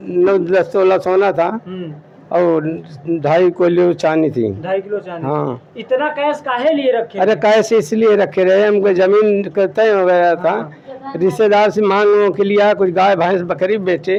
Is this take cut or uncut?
uncut